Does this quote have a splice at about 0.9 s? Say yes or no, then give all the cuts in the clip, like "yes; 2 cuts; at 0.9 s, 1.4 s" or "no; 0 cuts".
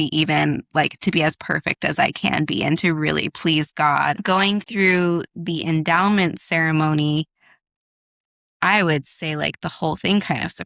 no; 1 cut; at 4.2 s